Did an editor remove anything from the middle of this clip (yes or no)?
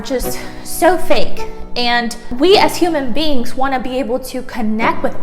yes